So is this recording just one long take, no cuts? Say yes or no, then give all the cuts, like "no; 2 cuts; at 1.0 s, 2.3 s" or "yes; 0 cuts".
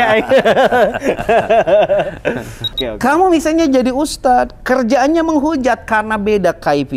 no; 1 cut; at 2.6 s